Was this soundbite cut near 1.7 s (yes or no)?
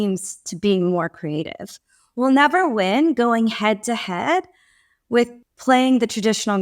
no